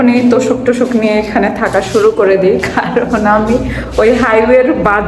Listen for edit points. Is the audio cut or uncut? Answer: uncut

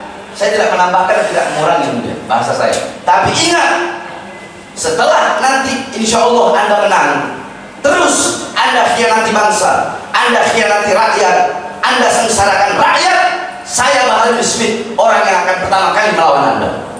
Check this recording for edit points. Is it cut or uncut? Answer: uncut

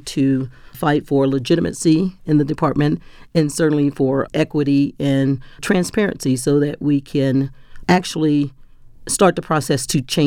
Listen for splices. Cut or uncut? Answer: uncut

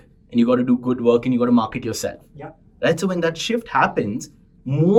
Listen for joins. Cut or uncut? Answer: uncut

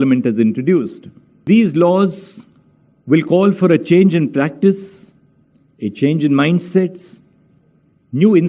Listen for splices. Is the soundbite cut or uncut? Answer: cut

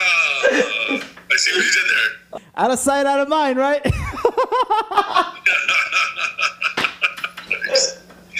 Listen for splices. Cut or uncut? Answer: cut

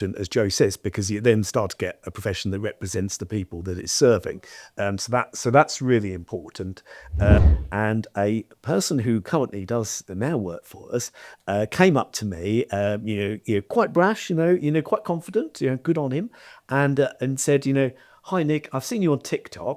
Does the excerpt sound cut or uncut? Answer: cut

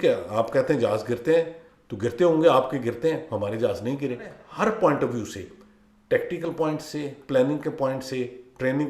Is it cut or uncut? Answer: cut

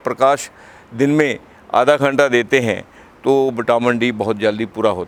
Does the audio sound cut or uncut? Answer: uncut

